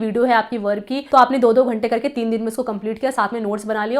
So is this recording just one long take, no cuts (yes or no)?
no